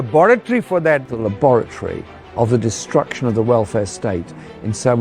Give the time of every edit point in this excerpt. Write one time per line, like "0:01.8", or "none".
0:01.1